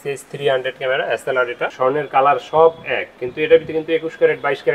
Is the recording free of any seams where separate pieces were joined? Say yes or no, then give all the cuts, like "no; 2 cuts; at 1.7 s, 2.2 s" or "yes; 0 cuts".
no; 1 cut; at 1.7 s